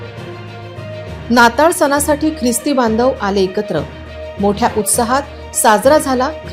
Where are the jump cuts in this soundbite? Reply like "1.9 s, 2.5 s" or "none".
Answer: 1.2 s